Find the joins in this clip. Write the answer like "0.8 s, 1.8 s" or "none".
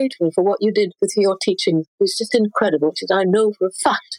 none